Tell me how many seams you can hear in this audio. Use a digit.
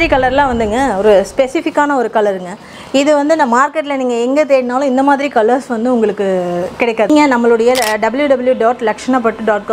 1